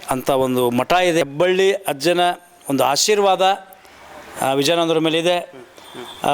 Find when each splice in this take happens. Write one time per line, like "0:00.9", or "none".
0:01.2

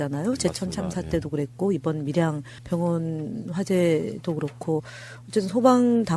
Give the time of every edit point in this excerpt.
0:04.9

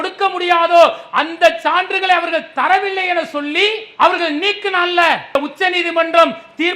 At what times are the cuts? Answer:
0:05.4

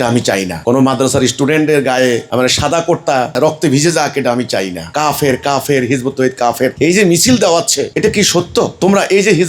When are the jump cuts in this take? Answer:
0:04.9

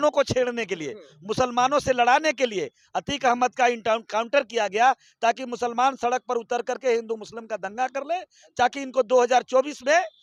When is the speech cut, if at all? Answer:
none

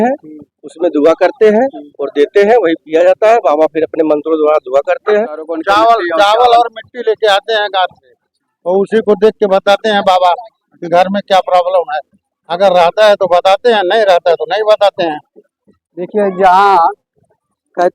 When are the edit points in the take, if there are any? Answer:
0:05.5

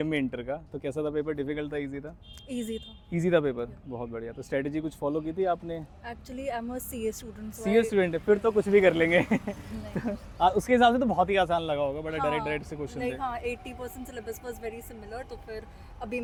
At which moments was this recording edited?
none

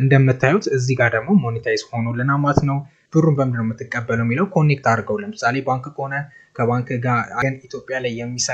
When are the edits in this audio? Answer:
0:02.9
0:07.3

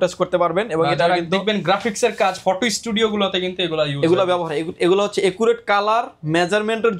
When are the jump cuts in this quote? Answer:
none

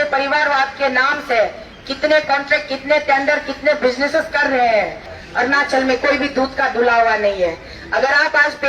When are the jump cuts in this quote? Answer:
0:05.1

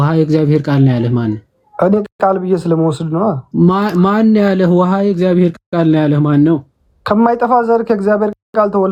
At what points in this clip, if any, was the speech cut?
none

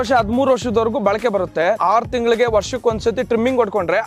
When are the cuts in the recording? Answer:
0:01.8

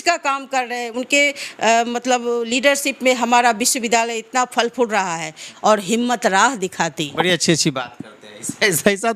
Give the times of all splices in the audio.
0:05.5

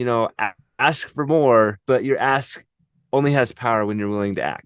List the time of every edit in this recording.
0:01.8

